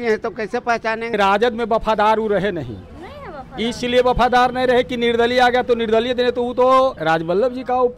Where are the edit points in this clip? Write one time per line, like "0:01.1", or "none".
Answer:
0:01.1
0:07.0